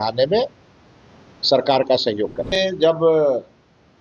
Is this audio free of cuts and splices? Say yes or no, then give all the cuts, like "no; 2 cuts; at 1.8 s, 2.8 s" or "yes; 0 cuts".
no; 1 cut; at 2.6 s